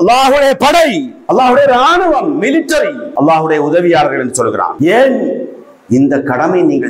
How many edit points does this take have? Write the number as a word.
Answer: three